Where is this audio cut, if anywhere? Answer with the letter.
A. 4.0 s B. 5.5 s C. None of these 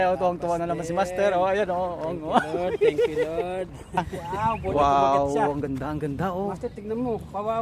A